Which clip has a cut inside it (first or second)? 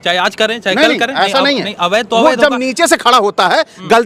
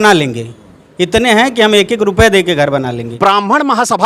second